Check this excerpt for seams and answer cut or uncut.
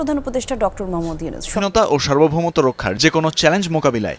cut